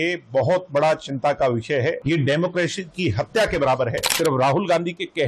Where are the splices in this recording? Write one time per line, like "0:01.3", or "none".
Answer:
0:02.0
0:04.1